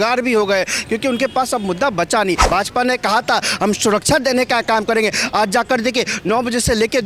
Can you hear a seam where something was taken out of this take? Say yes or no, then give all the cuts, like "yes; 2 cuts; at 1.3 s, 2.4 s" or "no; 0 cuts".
yes; 1 cut; at 2.4 s